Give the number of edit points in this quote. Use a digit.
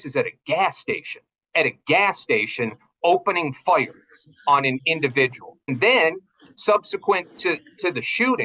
1